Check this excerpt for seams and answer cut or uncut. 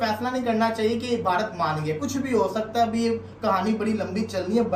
uncut